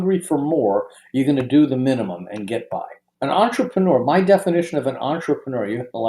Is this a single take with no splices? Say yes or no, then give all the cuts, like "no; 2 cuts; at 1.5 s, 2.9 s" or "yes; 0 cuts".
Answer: no; 1 cut; at 3.0 s